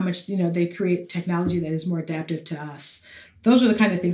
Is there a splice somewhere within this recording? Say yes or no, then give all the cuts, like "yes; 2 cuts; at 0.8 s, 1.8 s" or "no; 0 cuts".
yes; 1 cut; at 3.2 s